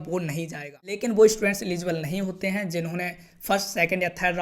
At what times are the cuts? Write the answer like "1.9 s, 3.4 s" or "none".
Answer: 1.0 s